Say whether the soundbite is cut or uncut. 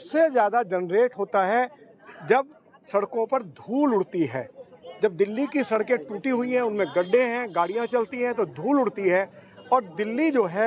uncut